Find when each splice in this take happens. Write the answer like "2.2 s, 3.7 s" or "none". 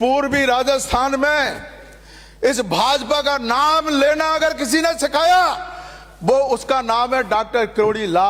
none